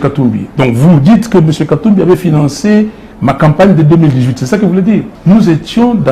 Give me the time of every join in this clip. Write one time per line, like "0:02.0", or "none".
0:05.1